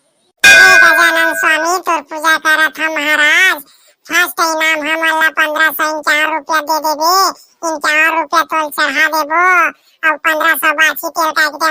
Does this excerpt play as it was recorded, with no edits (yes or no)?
yes